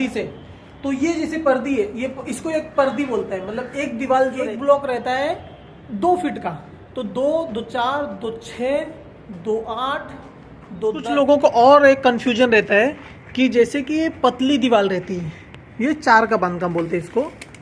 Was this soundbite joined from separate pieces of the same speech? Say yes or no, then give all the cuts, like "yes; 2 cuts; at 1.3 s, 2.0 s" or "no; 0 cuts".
yes; 2 cuts; at 4.4 s, 11.0 s